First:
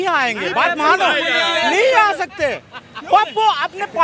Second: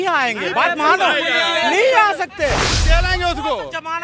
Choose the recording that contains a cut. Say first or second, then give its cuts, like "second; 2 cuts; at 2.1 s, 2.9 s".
second; 1 cut; at 2.7 s